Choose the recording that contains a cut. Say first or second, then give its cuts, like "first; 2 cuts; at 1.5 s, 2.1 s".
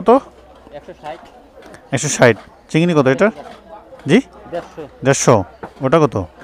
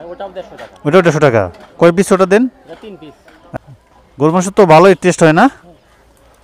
second; 1 cut; at 3.6 s